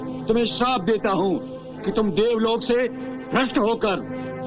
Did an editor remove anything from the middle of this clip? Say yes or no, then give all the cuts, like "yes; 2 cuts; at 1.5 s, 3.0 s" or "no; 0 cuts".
no; 0 cuts